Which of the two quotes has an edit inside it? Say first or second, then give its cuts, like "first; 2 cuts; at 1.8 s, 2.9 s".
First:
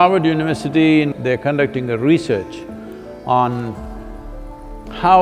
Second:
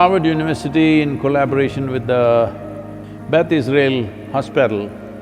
first; 1 cut; at 1.1 s